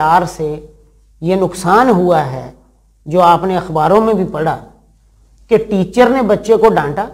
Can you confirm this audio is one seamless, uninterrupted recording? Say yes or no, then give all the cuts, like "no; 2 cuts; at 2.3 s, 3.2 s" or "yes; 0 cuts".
yes; 0 cuts